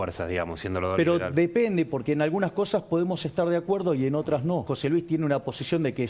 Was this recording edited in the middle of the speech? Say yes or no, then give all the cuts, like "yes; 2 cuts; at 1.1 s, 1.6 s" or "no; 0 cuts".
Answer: yes; 1 cut; at 4.7 s